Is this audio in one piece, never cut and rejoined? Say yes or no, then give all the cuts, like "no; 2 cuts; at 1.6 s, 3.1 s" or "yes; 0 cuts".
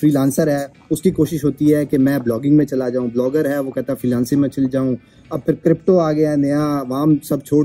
yes; 0 cuts